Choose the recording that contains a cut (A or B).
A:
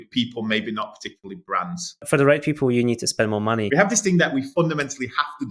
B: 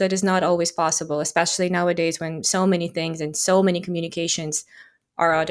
A